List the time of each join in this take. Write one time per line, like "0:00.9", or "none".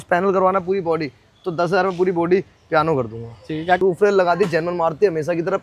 0:03.8